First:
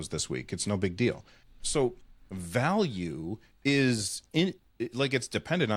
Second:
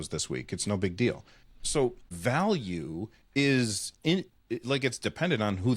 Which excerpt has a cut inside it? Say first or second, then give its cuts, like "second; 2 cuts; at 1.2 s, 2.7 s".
second; 1 cut; at 2.1 s